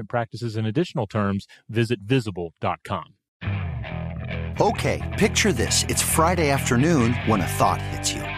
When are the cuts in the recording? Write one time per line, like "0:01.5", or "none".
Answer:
0:03.2